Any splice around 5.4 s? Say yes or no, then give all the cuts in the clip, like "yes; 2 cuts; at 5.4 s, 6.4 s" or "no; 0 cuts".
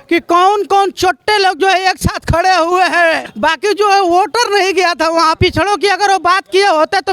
yes; 2 cuts; at 3.2 s, 5.4 s